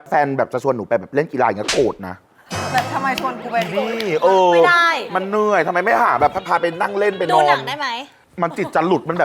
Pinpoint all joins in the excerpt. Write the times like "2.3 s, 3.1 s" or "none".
none